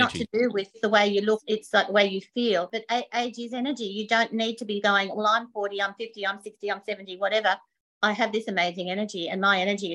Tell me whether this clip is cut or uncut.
cut